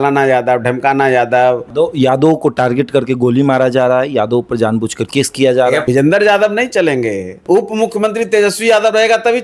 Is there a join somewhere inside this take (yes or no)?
yes